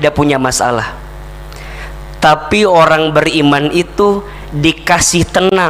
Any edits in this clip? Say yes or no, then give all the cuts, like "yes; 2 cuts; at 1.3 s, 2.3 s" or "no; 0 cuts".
no; 0 cuts